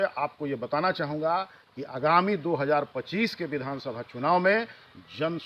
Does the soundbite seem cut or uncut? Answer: uncut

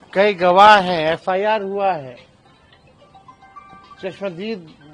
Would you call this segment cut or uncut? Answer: uncut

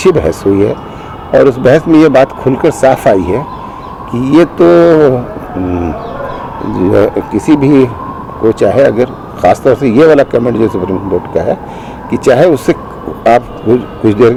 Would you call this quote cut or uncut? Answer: uncut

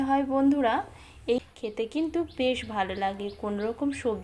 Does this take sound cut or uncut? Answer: cut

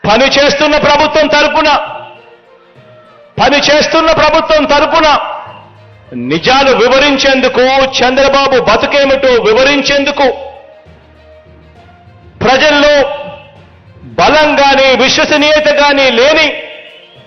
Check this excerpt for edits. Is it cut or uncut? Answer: cut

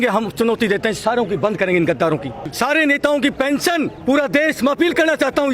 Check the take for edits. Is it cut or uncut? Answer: cut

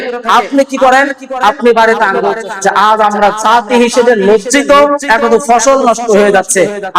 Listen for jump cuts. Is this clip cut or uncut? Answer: cut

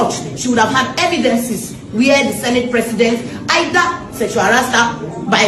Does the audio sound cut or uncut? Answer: uncut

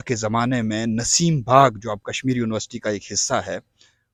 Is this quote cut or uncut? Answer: uncut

